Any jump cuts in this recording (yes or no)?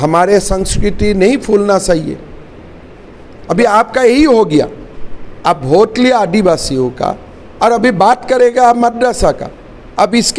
no